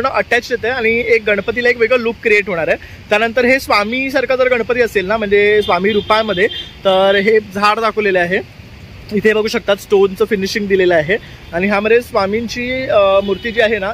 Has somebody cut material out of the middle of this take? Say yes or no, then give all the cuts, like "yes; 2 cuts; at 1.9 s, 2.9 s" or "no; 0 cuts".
no; 0 cuts